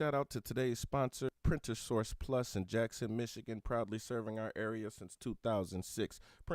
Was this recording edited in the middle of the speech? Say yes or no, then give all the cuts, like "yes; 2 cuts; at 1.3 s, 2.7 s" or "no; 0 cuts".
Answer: yes; 1 cut; at 1.4 s